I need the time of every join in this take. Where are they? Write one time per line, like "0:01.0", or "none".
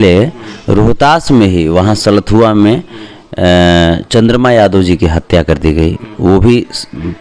none